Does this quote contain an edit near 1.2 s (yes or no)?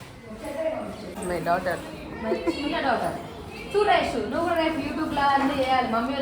yes